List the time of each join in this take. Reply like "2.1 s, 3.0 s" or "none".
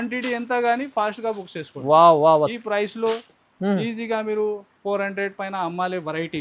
none